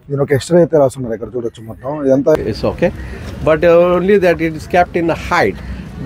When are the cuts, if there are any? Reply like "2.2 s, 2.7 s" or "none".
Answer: 2.4 s